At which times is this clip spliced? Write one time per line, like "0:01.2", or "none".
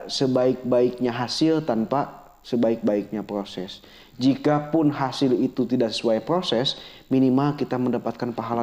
none